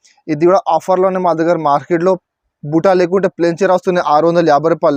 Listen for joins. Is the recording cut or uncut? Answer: uncut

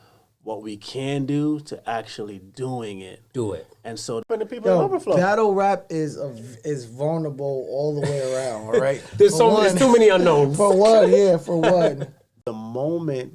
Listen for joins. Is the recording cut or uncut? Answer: cut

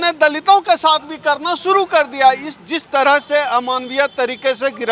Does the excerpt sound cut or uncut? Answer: uncut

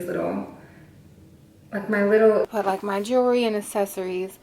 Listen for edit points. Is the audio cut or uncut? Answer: cut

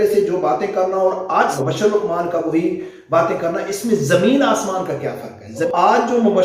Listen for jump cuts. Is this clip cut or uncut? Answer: cut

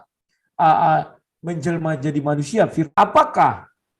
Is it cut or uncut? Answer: cut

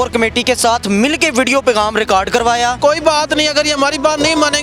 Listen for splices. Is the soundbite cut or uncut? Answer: cut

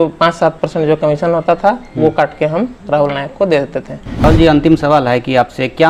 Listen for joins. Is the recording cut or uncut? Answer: cut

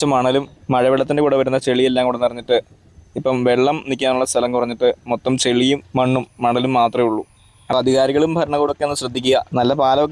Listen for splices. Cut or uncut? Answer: cut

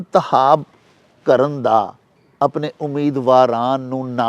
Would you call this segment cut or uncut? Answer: uncut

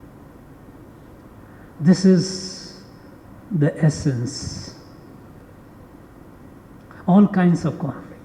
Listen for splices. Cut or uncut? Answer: cut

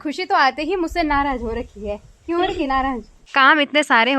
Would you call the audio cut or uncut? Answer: cut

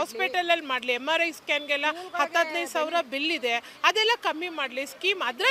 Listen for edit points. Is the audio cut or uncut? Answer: uncut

